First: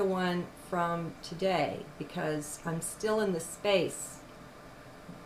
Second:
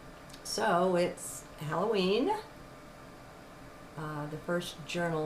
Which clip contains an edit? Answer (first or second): second